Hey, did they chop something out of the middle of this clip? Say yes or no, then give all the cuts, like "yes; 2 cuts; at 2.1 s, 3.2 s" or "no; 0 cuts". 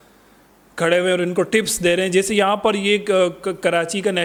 no; 0 cuts